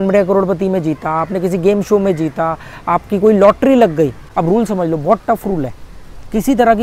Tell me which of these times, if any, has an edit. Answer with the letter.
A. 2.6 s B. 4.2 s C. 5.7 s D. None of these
B